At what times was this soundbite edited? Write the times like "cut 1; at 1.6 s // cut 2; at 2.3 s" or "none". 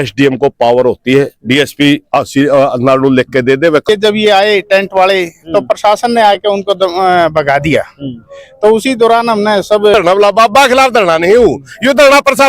cut 1; at 3.8 s // cut 2; at 9.9 s

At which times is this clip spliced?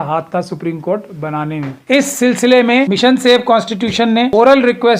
cut 1; at 1.8 s // cut 2; at 2.9 s // cut 3; at 4.3 s

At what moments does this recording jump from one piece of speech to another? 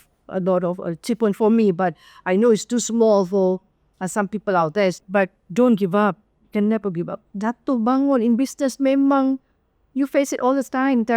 cut 1; at 5.0 s

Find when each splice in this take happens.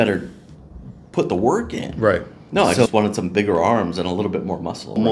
cut 1; at 2.4 s

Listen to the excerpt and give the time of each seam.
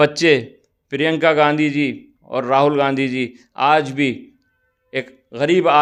none

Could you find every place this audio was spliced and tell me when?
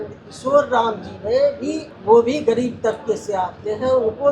cut 1; at 1.9 s

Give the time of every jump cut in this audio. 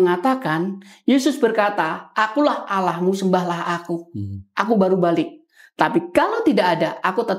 none

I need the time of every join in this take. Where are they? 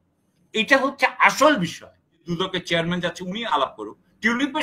cut 1; at 2.2 s

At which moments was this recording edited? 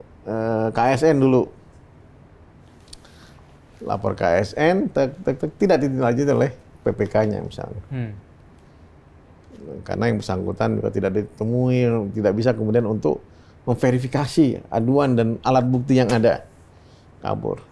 none

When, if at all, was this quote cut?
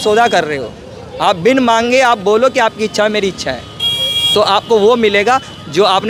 none

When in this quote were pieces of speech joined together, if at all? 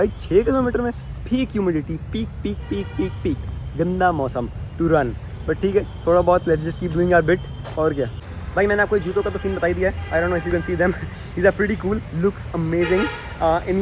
none

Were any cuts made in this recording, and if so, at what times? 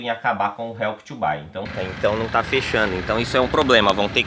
cut 1; at 1.7 s

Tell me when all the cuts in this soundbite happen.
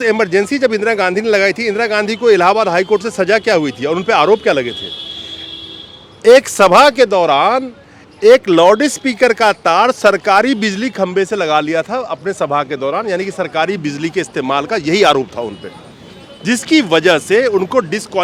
none

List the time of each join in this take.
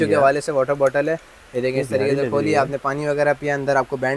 none

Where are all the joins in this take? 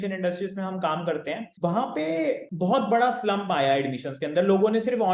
cut 1; at 1.5 s // cut 2; at 2.5 s

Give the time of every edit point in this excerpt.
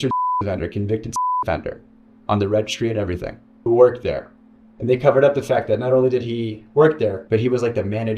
cut 1; at 7.2 s

